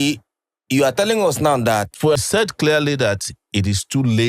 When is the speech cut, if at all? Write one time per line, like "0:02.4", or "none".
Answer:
0:02.2

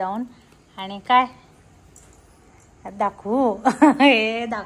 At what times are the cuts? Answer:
none

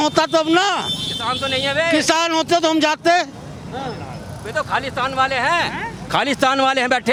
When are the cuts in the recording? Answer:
none

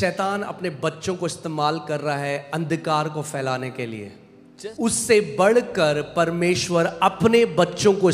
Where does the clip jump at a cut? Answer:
0:04.5

